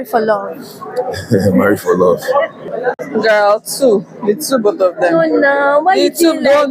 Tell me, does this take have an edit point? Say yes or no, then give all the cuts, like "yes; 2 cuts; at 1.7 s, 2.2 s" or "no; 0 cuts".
yes; 1 cut; at 2.6 s